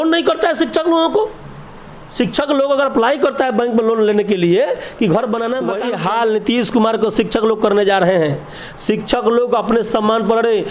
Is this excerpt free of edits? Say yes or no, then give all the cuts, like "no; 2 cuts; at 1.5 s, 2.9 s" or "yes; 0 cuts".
no; 1 cut; at 5.8 s